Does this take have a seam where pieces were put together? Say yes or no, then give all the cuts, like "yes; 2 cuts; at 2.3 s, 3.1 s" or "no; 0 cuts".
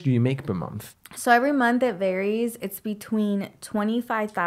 no; 0 cuts